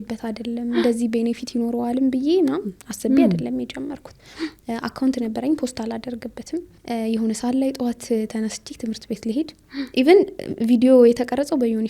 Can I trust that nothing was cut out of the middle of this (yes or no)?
no